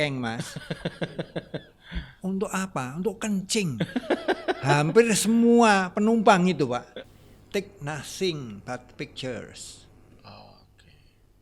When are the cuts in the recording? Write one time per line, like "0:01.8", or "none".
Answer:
0:07.0